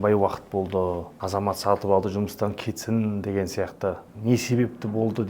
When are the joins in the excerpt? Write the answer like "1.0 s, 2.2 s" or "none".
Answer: 1.1 s, 4.1 s